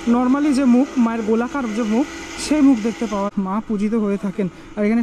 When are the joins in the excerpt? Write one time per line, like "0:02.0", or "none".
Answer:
0:03.3